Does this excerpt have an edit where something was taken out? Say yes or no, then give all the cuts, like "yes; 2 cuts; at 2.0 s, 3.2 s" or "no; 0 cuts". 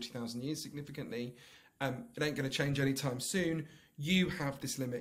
no; 0 cuts